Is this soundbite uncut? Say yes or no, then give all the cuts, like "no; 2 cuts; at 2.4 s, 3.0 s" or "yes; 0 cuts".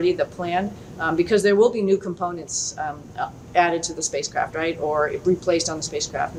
yes; 0 cuts